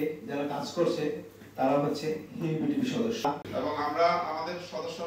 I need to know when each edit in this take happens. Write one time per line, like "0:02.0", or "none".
0:03.5